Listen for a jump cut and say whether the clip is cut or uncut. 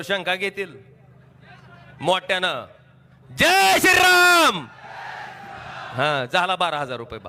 uncut